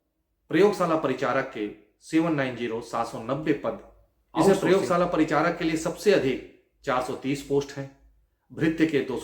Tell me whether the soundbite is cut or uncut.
cut